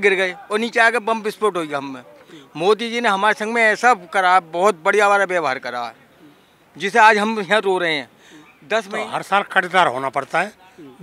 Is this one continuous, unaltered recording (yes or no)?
no